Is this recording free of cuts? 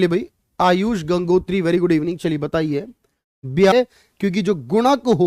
no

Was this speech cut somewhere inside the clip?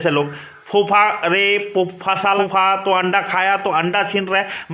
yes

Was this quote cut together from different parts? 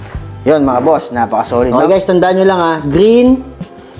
yes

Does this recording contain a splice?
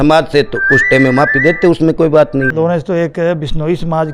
yes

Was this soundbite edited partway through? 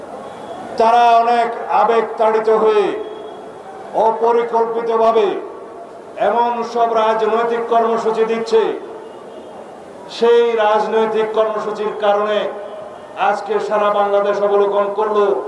no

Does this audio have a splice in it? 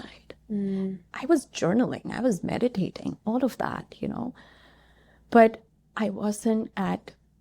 yes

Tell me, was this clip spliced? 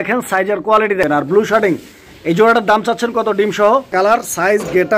yes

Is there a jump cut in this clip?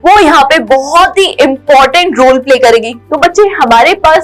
yes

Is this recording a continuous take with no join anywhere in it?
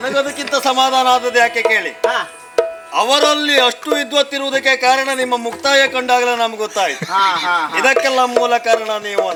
yes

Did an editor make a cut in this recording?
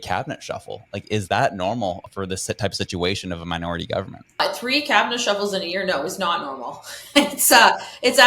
yes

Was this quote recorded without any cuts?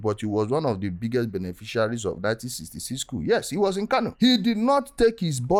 yes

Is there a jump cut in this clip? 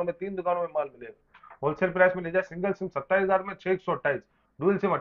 no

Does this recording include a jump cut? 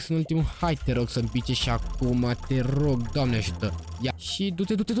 yes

